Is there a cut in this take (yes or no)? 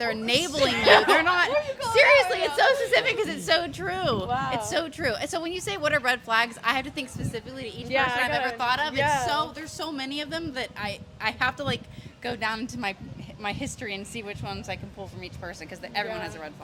no